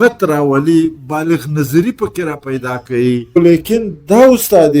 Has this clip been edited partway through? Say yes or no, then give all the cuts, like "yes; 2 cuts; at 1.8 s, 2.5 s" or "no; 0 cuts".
yes; 1 cut; at 3.4 s